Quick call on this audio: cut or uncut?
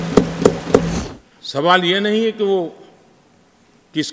cut